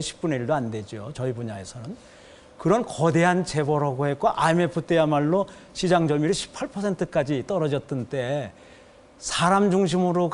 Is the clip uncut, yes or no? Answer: yes